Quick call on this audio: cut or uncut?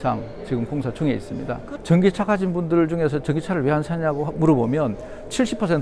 cut